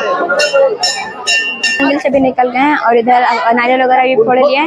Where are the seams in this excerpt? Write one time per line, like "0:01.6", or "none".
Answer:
0:01.8